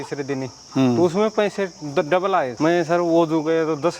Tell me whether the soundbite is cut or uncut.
cut